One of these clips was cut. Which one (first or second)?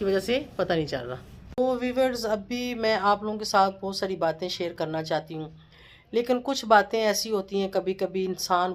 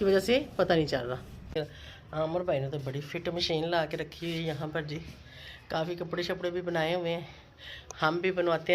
second